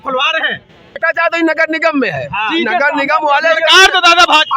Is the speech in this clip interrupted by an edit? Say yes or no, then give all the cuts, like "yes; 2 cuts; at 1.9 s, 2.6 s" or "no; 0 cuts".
yes; 1 cut; at 1.0 s